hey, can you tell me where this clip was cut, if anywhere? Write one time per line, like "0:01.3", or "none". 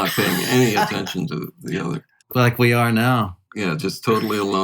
0:02.3
0:03.4

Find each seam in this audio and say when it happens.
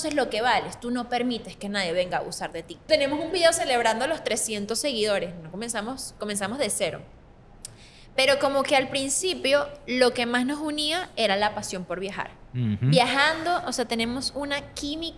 0:02.8

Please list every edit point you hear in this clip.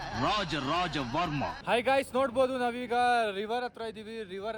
0:01.6

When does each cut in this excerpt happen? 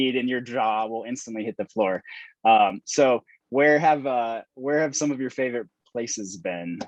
none

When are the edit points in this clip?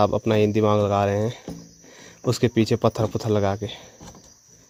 none

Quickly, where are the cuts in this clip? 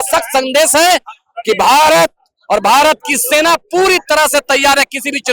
none

